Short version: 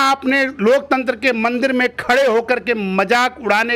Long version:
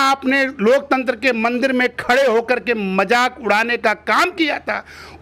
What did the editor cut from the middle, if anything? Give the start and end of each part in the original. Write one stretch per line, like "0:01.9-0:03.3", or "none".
none